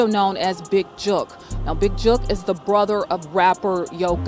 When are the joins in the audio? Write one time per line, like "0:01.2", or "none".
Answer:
none